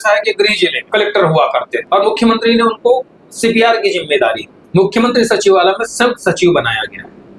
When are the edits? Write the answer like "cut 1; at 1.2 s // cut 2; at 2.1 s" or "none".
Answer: cut 1; at 0.8 s // cut 2; at 1.8 s // cut 3; at 4.5 s